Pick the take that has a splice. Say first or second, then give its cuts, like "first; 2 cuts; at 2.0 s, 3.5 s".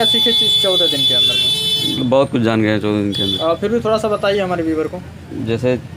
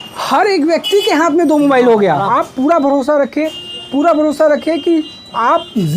second; 1 cut; at 2.3 s